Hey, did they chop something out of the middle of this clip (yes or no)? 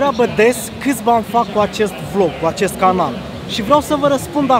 no